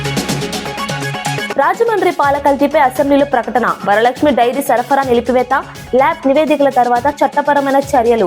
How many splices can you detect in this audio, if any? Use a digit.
1